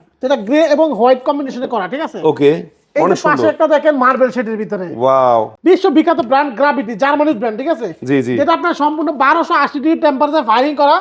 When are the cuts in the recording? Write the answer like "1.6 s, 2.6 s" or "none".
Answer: 5.5 s